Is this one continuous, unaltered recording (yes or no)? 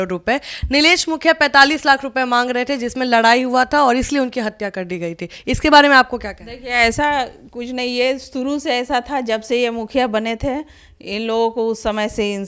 yes